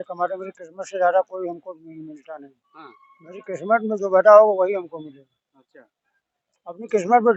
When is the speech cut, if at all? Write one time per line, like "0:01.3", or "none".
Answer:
none